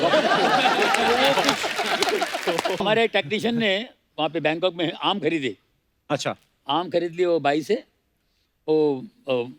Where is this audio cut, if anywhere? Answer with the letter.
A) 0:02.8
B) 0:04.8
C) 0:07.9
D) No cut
A